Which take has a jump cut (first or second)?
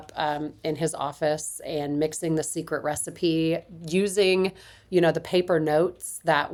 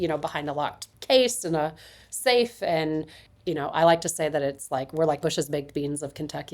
second